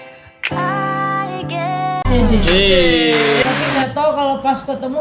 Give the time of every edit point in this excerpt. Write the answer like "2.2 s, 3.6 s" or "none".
3.4 s

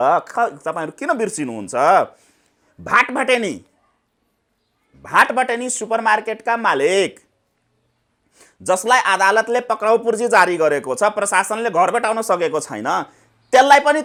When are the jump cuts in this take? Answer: none

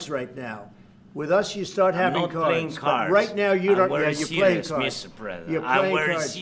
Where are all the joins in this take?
none

